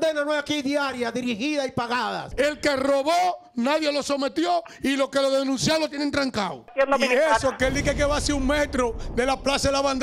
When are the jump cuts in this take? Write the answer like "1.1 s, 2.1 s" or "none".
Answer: 2.2 s, 6.7 s